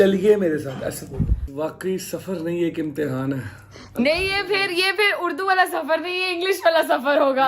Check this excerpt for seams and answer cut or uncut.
cut